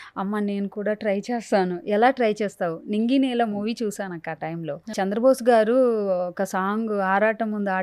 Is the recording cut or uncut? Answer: cut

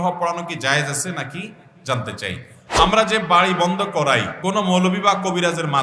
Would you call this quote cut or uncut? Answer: cut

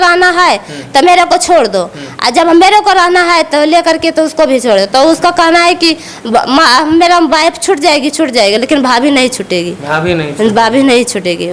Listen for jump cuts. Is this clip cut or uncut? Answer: uncut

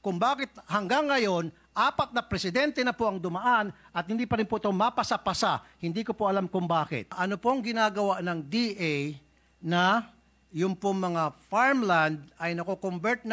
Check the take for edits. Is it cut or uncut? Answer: cut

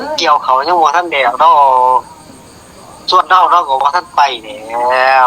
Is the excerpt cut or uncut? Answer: uncut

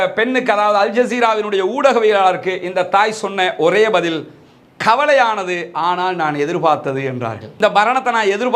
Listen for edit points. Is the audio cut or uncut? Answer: uncut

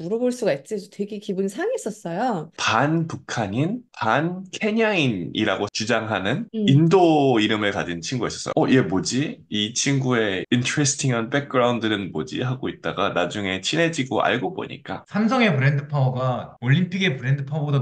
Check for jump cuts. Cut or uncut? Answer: cut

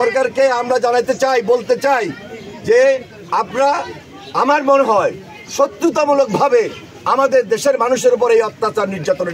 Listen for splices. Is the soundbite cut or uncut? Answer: uncut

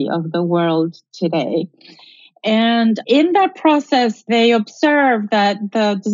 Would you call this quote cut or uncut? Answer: cut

